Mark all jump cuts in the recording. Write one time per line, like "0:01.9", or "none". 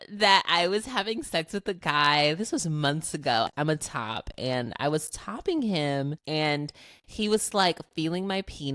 0:03.5
0:06.2